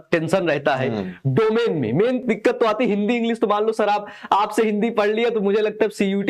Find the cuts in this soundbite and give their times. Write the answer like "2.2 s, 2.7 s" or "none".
none